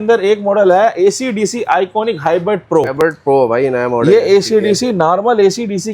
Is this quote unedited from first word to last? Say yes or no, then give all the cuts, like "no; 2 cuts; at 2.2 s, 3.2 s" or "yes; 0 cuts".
no; 1 cut; at 2.9 s